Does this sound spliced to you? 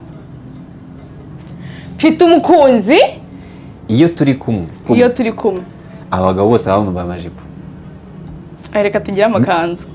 yes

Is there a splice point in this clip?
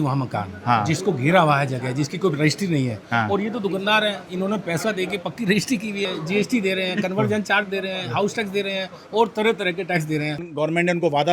yes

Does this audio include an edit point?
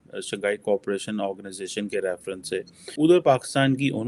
yes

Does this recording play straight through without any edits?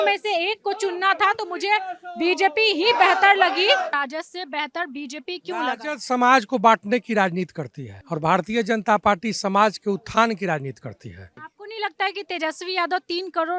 no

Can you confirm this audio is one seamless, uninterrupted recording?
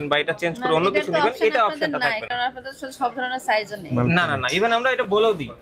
yes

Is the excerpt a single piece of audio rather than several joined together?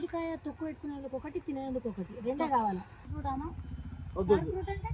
no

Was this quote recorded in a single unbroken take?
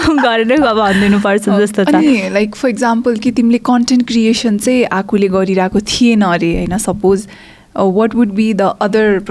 no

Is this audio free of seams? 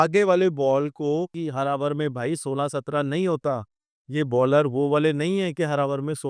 no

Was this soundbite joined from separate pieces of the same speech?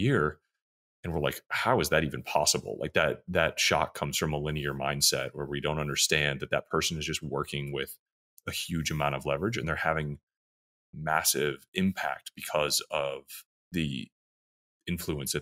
no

